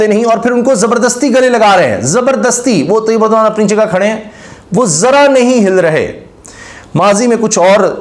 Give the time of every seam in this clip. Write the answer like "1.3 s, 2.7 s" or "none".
none